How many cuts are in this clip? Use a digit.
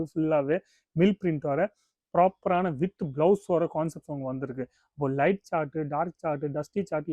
0